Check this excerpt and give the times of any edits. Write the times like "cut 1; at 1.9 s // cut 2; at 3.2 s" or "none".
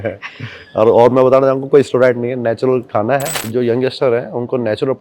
cut 1; at 3.5 s